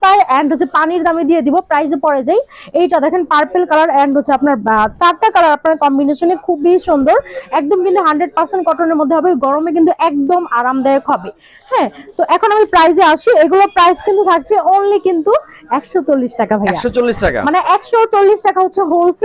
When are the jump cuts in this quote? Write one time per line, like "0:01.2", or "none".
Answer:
none